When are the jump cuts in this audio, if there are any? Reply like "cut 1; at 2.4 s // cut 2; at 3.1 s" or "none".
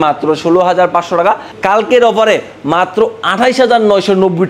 cut 1; at 1.5 s